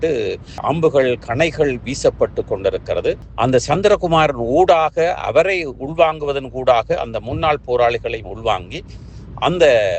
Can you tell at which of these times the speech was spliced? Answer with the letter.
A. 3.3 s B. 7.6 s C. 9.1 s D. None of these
A